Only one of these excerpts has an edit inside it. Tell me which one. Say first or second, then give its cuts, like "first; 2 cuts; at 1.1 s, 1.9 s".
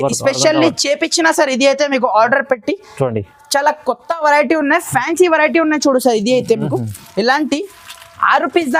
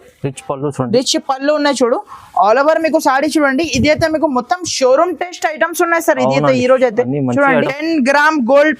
second; 1 cut; at 7.7 s